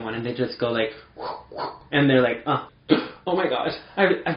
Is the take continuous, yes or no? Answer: no